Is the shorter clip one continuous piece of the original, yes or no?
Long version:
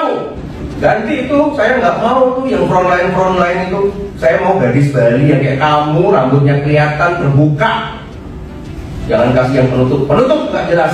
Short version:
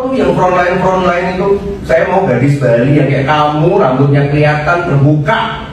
yes